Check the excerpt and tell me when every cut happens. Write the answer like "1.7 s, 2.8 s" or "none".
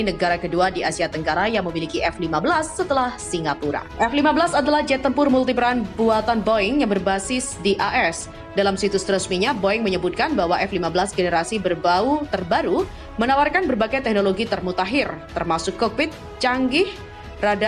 3.9 s

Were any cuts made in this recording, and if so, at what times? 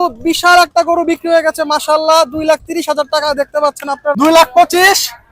4.2 s

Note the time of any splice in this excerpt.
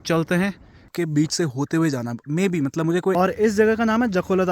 0.9 s, 3.1 s

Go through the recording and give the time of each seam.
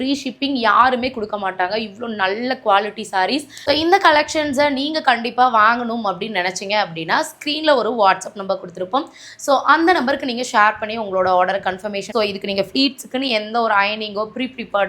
3.5 s, 12.1 s

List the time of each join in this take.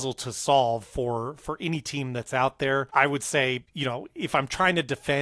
2.9 s, 3.7 s

